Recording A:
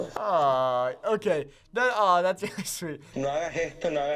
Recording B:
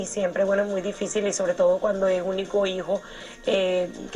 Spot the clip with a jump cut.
A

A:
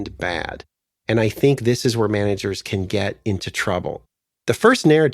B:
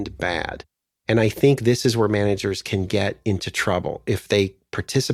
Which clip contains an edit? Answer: A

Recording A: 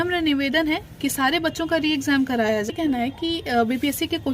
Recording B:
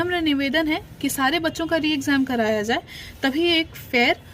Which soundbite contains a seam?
A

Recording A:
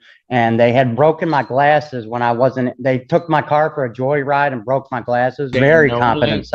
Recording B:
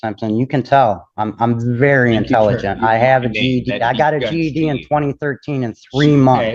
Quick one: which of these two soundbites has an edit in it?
A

